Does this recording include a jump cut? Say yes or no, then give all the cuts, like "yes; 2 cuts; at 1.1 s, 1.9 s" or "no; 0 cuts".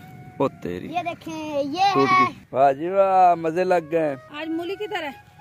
yes; 1 cut; at 2.4 s